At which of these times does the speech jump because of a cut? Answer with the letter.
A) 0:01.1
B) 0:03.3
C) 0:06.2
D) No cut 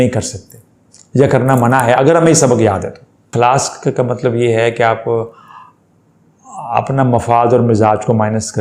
B